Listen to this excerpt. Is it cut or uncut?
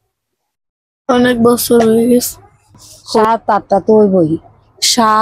cut